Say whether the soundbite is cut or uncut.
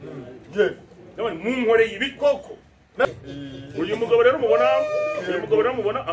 cut